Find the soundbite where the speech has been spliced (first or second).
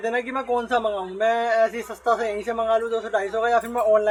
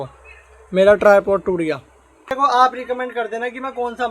second